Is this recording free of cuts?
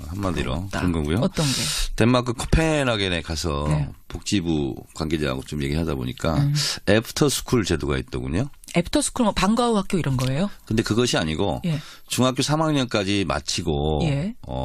no; 1 cut; at 2.8 s

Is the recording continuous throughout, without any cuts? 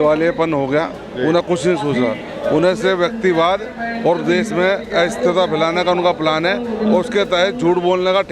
yes; 0 cuts

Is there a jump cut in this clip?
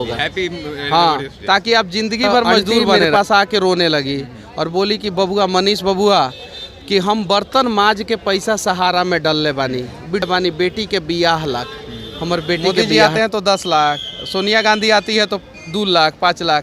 yes; 3 cuts; at 3.0 s, 10.2 s, 12.8 s

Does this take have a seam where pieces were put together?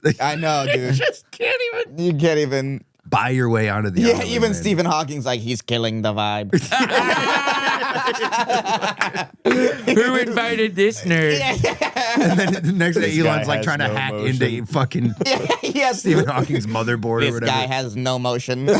no; 0 cuts

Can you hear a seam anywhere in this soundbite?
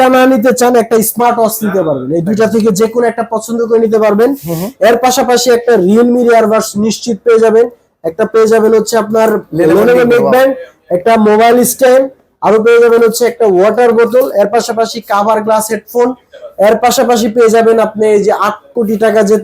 no; 0 cuts

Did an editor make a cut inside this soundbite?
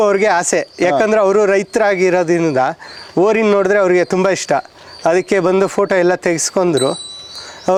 no; 0 cuts

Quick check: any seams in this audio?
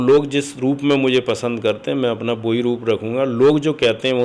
no; 0 cuts

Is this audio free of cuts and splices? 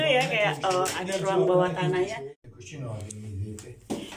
no; 1 cut; at 2.3 s

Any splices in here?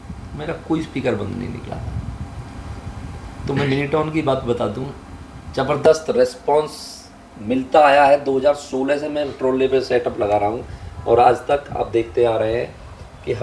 no; 0 cuts

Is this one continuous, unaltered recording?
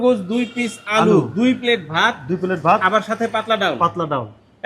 yes; 0 cuts

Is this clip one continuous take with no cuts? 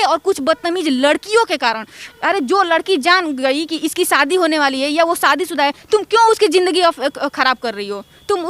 yes; 0 cuts

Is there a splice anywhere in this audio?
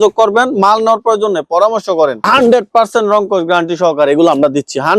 yes; 1 cut; at 2.2 s

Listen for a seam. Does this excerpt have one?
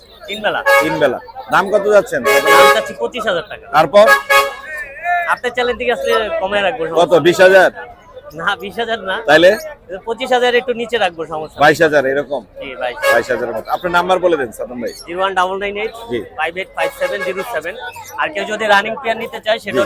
no; 0 cuts

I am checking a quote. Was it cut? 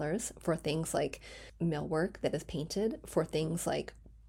no; 0 cuts

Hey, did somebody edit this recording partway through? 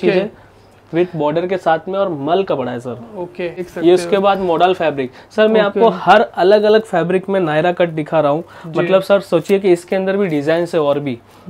yes; 1 cut; at 3.7 s

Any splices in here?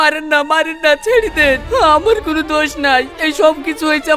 no; 0 cuts

